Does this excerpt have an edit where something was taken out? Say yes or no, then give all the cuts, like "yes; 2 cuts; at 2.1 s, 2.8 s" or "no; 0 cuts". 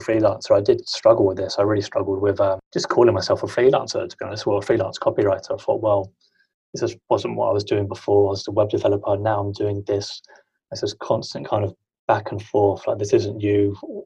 yes; 1 cut; at 2.6 s